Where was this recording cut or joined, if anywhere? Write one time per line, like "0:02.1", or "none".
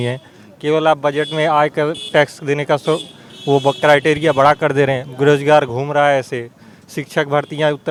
none